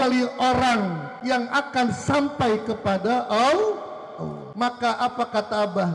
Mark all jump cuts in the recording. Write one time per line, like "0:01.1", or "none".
0:01.1
0:04.4